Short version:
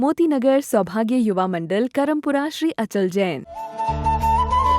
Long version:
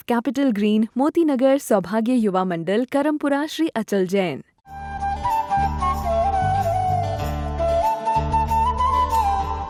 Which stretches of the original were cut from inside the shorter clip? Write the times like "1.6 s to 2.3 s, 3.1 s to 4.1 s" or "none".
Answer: 4.7 s to 8.0 s